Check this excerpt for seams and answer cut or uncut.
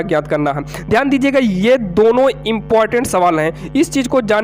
uncut